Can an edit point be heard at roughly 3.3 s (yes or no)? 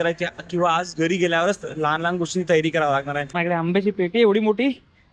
yes